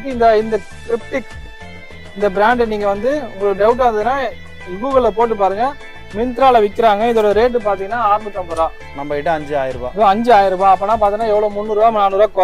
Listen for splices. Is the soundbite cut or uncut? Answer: uncut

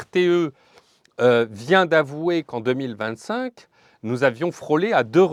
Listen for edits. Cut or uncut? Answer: uncut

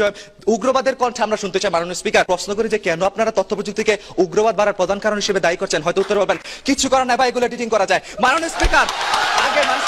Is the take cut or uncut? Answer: cut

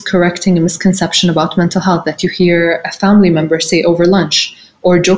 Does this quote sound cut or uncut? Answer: uncut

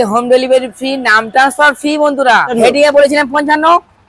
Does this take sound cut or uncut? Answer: cut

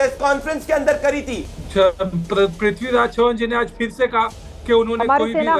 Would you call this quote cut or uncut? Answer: cut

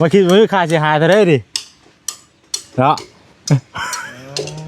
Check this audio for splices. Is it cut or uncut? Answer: uncut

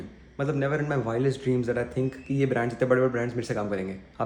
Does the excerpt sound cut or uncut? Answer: uncut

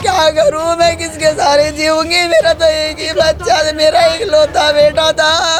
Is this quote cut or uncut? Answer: uncut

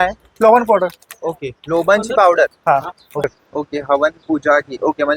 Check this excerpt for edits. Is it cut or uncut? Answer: cut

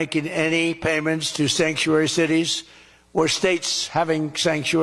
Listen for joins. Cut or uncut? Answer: uncut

